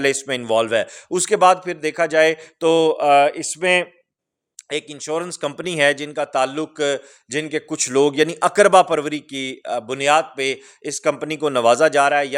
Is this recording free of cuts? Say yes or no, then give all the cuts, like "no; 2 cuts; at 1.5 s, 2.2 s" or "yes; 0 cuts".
yes; 0 cuts